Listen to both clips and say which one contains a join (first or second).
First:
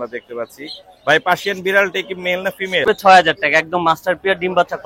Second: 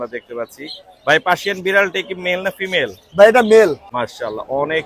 first